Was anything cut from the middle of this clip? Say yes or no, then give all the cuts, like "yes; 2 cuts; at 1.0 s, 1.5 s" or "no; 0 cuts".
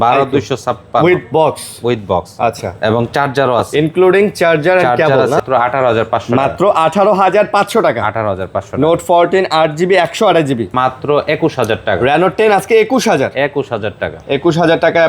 yes; 2 cuts; at 5.4 s, 10.7 s